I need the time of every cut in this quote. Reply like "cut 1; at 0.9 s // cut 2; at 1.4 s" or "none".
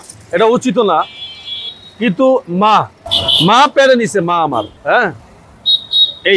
none